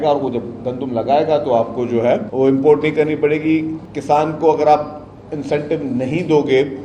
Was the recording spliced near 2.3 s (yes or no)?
yes